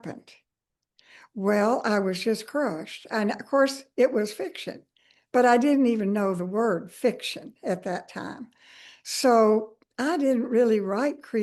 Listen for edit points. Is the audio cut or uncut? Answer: uncut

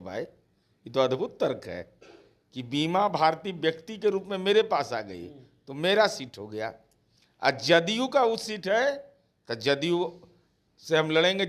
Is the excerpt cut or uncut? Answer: uncut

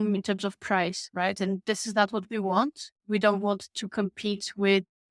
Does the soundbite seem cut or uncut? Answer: uncut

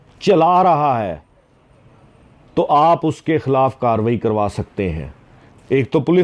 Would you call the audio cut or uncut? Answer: uncut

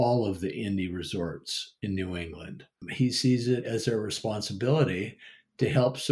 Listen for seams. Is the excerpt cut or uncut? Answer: cut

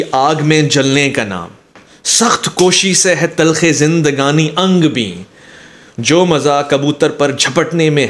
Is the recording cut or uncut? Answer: uncut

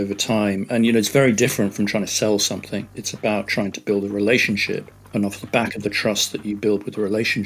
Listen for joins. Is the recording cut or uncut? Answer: uncut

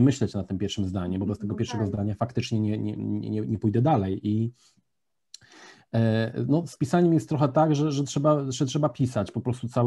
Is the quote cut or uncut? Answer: uncut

